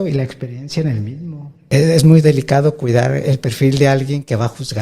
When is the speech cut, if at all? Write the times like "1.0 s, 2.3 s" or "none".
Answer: 1.5 s